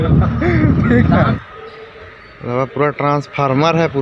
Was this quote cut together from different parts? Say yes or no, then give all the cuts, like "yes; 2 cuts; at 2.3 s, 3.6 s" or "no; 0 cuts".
yes; 1 cut; at 1.4 s